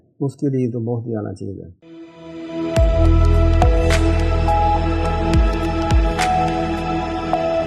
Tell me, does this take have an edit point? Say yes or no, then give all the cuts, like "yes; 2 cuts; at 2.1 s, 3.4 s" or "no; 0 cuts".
no; 0 cuts